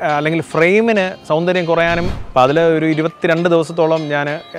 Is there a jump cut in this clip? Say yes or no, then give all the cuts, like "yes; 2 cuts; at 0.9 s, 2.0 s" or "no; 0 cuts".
yes; 1 cut; at 2.2 s